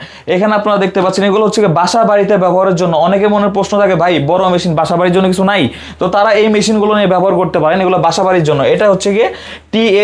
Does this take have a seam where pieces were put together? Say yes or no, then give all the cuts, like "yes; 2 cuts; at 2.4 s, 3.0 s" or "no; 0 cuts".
no; 0 cuts